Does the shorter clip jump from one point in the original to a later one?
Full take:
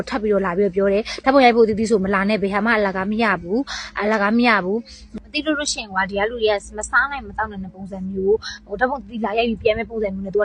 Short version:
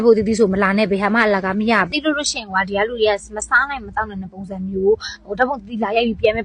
yes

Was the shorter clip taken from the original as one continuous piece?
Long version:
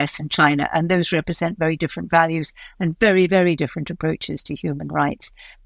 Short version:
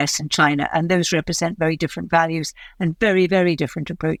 yes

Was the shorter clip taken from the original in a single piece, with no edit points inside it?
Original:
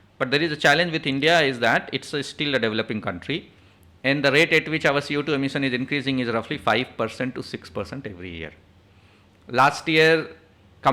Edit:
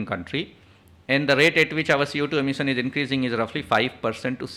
yes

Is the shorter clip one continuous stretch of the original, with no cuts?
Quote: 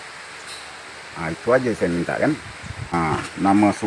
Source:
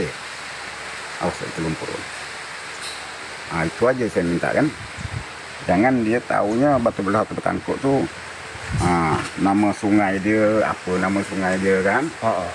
no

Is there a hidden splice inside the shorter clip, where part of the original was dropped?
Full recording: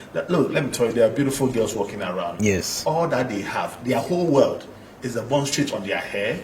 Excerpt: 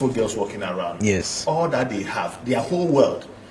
no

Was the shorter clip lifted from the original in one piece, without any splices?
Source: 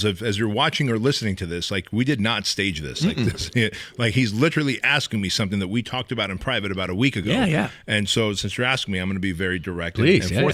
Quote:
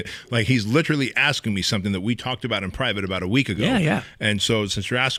yes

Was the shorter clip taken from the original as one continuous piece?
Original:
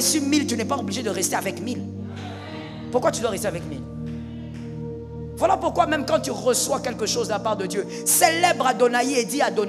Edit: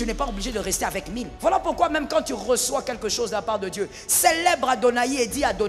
no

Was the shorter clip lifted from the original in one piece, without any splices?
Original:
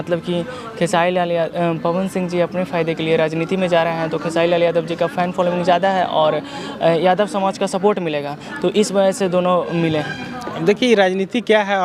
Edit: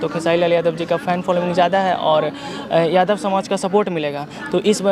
yes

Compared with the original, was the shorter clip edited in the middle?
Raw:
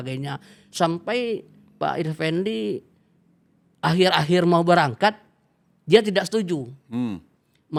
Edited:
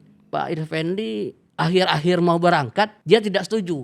yes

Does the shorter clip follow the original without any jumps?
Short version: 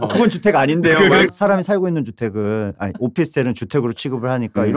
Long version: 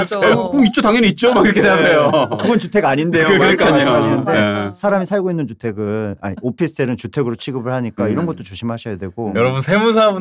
no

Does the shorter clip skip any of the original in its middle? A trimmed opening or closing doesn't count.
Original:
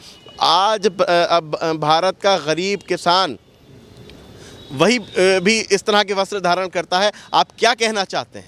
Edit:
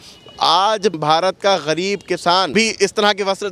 yes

